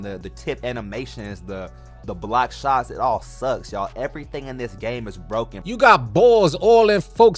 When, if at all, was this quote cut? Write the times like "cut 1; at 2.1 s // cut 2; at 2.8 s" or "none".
cut 1; at 5.6 s